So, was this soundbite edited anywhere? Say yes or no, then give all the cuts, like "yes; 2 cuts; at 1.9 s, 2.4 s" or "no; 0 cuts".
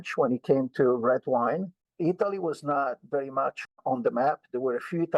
yes; 2 cuts; at 1.8 s, 3.6 s